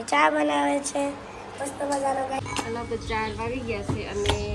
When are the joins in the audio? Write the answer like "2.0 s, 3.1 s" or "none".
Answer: 2.4 s